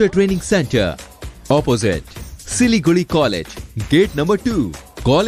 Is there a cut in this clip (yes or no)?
no